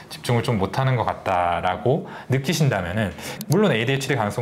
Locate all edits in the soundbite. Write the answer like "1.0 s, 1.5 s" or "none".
3.4 s